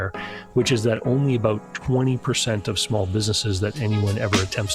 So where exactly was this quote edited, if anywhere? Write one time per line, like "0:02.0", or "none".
none